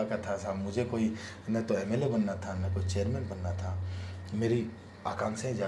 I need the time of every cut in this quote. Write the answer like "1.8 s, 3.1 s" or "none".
none